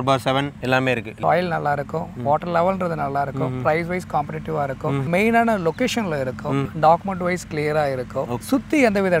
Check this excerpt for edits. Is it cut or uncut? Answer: cut